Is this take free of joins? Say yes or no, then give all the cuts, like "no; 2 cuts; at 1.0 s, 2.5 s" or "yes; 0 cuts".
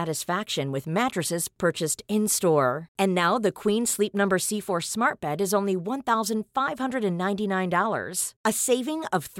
yes; 0 cuts